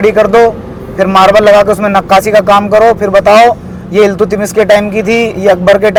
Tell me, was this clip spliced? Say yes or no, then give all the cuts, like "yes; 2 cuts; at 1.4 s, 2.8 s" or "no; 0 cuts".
no; 0 cuts